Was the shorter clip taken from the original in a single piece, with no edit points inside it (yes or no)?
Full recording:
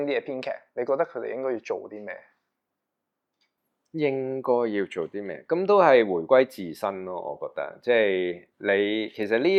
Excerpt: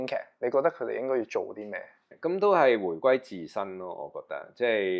no